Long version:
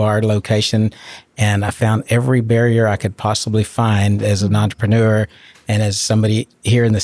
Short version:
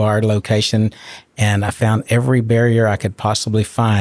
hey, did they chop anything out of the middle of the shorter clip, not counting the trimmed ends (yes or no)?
no